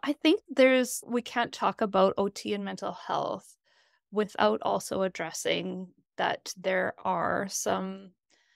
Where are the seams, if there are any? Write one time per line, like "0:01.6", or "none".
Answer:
none